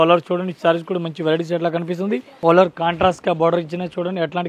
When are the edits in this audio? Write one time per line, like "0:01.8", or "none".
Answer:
0:02.3